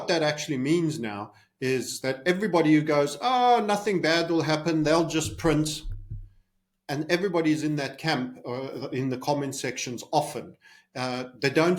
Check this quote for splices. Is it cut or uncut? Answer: uncut